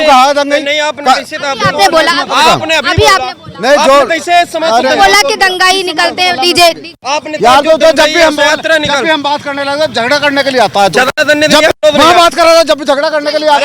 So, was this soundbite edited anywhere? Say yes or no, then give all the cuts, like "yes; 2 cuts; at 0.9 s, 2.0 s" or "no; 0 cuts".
no; 0 cuts